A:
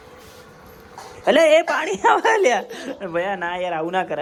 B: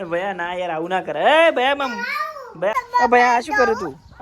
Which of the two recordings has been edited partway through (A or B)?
B